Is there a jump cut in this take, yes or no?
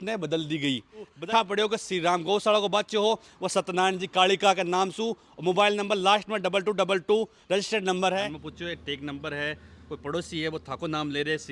yes